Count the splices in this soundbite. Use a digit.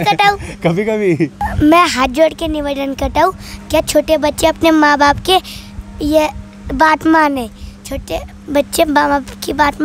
1